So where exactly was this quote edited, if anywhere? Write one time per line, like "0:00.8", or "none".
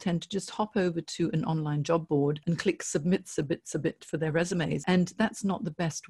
0:02.4
0:04.8